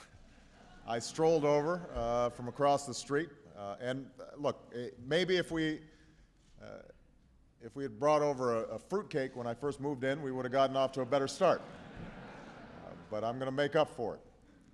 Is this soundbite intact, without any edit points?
yes; 0 cuts

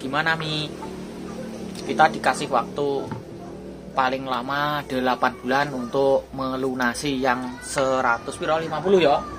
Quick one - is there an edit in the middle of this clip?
no; 0 cuts

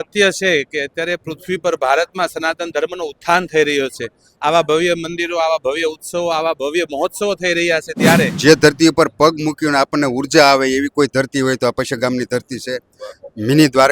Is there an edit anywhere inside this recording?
yes; 1 cut; at 8.3 s

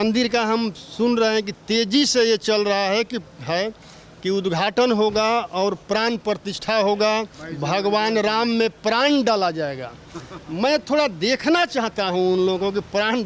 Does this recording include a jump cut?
no; 0 cuts

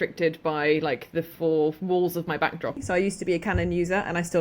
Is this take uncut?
no; 1 cut; at 2.8 s

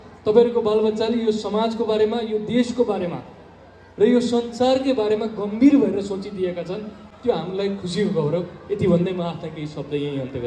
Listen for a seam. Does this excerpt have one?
no; 0 cuts

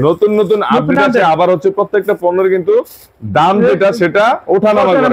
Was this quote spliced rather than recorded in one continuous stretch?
no; 0 cuts

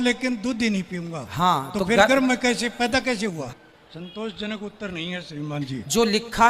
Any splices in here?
yes; 1 cut; at 3.4 s

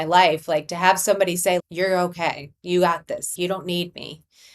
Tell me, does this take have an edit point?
yes; 2 cuts; at 1.6 s, 3.3 s

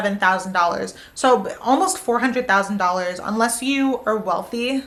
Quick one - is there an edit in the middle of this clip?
no; 0 cuts

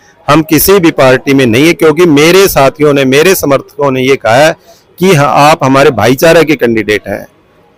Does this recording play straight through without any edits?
yes; 0 cuts

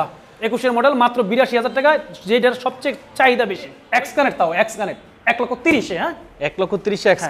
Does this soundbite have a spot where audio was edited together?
yes; 1 cut; at 3.8 s

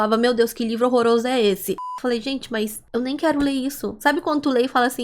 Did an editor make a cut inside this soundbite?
yes; 1 cut; at 1.8 s

